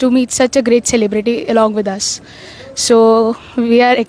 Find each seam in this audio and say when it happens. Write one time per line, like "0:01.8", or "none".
none